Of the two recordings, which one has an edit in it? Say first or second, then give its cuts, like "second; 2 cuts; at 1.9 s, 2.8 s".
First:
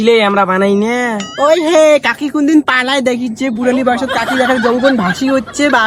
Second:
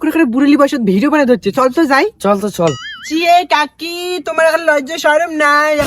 second; 1 cut; at 2.9 s